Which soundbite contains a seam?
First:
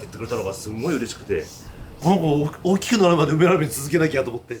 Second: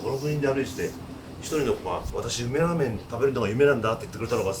second; 2 cuts; at 2.1 s, 3.0 s

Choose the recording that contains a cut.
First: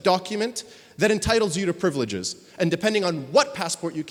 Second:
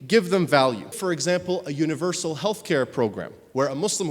second; 1 cut; at 1.0 s

